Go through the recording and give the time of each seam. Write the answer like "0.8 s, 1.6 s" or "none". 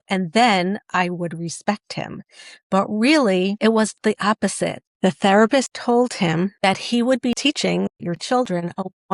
3.6 s, 4.8 s, 5.7 s, 6.5 s